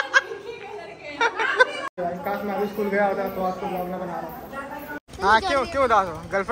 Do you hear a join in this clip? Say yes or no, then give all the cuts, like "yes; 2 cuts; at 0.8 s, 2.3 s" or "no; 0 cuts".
yes; 2 cuts; at 1.9 s, 5.0 s